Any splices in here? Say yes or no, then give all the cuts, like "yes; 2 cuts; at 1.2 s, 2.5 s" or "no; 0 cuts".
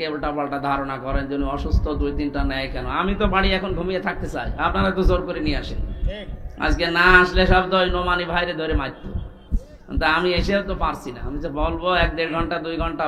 no; 0 cuts